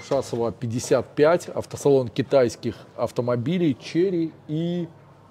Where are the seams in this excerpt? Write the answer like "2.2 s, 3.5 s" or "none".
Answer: none